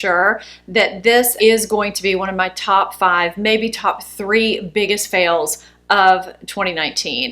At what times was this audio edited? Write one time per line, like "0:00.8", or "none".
0:01.3